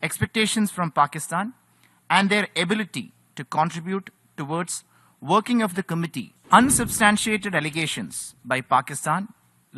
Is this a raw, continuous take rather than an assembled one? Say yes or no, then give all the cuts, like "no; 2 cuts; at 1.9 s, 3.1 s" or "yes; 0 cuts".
no; 1 cut; at 6.3 s